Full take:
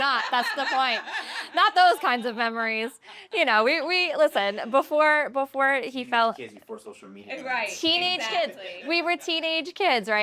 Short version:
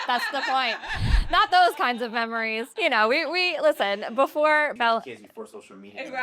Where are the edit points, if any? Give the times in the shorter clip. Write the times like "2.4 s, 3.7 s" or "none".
2.6 s, 4.7 s